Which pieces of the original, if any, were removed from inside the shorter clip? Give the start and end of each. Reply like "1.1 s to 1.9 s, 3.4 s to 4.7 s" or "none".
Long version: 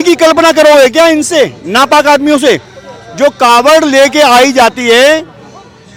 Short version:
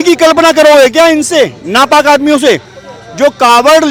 none